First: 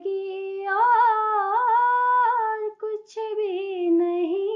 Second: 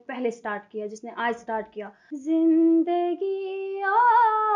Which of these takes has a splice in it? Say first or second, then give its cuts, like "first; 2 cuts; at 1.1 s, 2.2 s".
second; 1 cut; at 2.0 s